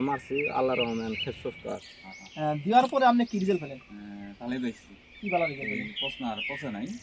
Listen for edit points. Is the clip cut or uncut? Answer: cut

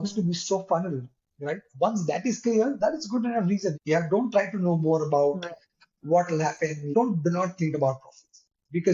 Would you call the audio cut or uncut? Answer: cut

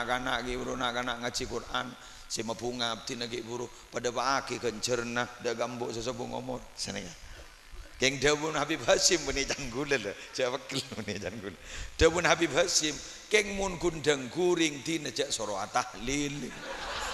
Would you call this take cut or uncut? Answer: uncut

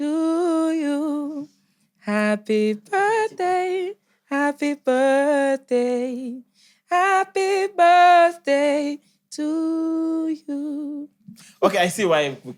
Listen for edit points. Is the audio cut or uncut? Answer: uncut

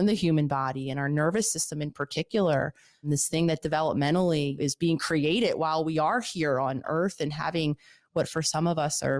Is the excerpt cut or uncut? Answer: cut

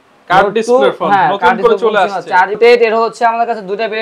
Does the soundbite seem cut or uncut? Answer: cut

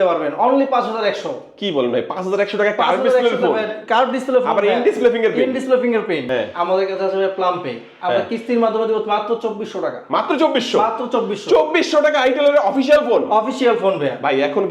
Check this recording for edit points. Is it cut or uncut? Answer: cut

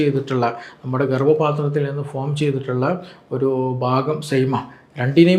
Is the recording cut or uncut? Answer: uncut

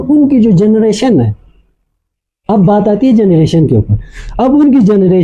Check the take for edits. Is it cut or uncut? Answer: uncut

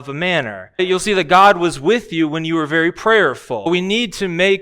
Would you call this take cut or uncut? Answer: cut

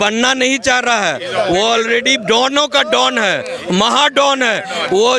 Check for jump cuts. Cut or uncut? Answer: uncut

